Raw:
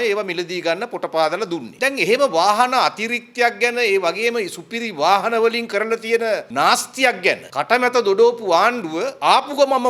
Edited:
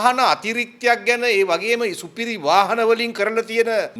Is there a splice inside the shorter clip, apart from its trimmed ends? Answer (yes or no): no